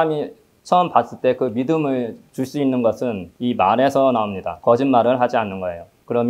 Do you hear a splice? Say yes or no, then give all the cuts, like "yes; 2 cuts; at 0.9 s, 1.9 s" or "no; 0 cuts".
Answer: yes; 1 cut; at 4.5 s